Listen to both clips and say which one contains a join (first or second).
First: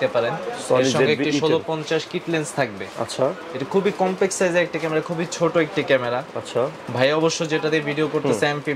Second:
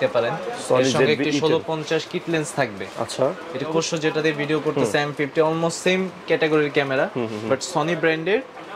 second